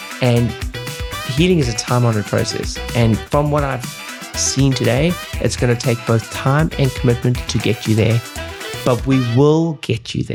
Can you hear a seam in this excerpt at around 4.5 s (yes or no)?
no